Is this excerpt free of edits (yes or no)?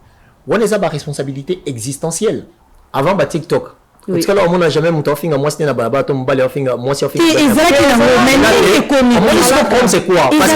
no